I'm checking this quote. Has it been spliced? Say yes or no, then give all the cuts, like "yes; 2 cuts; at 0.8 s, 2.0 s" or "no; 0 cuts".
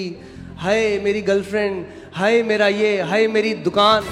no; 0 cuts